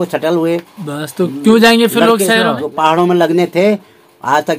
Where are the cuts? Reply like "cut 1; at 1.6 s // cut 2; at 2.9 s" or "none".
cut 1; at 2.6 s